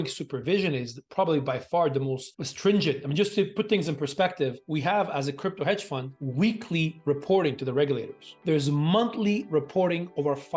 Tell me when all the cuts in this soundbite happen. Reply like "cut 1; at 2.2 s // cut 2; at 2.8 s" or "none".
cut 1; at 8.3 s

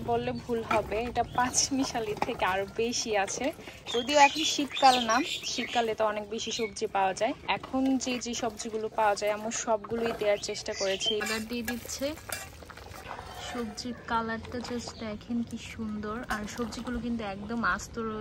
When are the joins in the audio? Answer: cut 1; at 3.8 s // cut 2; at 7.4 s // cut 3; at 11.2 s // cut 4; at 13.0 s

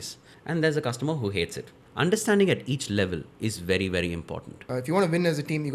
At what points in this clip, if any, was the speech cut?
cut 1; at 4.5 s

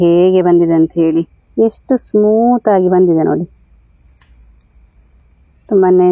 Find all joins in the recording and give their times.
none

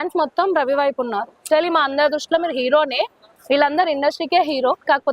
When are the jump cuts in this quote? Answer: cut 1; at 1.4 s // cut 2; at 3.3 s

